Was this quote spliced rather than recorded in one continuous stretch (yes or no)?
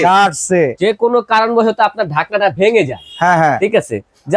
no